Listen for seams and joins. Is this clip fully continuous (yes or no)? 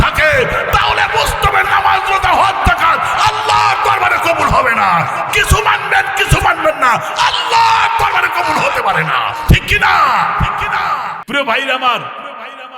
no